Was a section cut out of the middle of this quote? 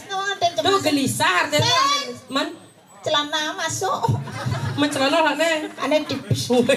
no; 0 cuts

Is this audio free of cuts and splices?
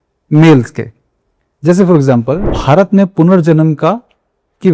no; 1 cut; at 2.5 s

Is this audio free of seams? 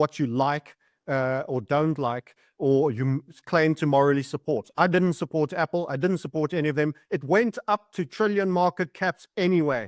yes; 0 cuts

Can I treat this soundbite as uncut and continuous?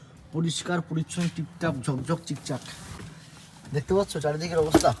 yes; 0 cuts

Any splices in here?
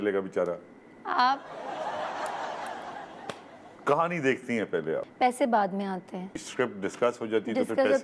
yes; 3 cuts; at 3.7 s, 5.0 s, 6.3 s

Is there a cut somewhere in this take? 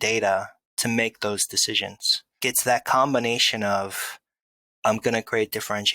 yes; 1 cut; at 2.4 s

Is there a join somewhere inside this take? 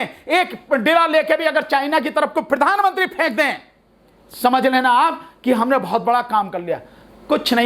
no; 0 cuts

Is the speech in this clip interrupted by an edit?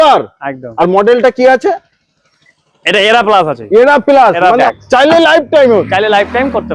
yes; 1 cut; at 4.7 s

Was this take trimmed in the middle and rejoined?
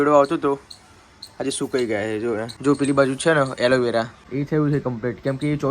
yes; 2 cuts; at 2.5 s, 4.2 s

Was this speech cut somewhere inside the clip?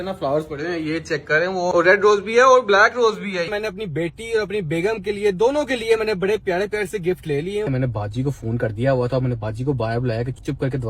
yes; 3 cuts; at 1.7 s, 3.5 s, 7.7 s

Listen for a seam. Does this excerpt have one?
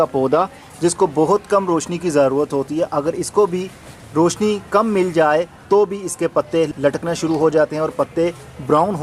no; 0 cuts

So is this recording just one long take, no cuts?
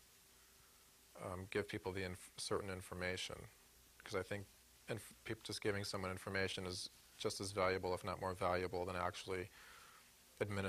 no; 1 cut; at 6.4 s

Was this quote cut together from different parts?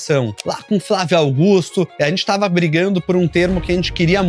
no; 0 cuts

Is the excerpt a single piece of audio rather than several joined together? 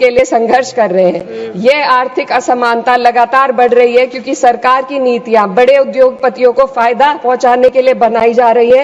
yes; 0 cuts

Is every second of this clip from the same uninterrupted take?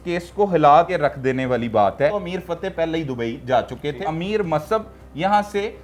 no; 3 cuts; at 0.9 s, 2.1 s, 4.1 s

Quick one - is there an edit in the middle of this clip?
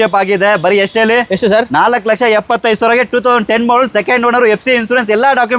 no; 0 cuts

